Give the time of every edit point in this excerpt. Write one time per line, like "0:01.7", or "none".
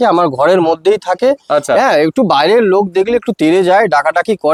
none